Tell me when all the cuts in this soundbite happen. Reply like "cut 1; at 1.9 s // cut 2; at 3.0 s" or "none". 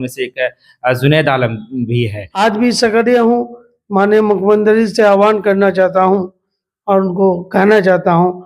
cut 1; at 2.2 s